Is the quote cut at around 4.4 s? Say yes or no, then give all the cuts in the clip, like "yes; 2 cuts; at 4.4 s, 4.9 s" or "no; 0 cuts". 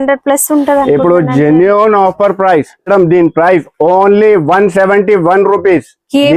no; 1 cut; at 2.9 s